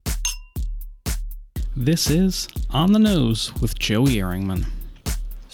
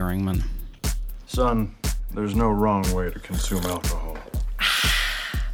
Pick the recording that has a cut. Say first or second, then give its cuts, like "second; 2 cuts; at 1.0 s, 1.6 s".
first; 1 cut; at 1.5 s